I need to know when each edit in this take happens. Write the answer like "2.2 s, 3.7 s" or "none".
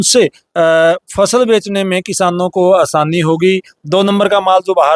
none